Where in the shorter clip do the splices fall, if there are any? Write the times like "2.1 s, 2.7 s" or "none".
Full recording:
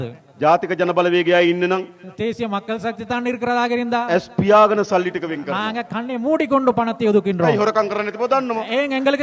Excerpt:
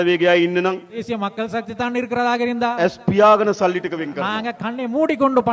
1.0 s